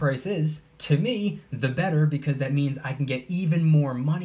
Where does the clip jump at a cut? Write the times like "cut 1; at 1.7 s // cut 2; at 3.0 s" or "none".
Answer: none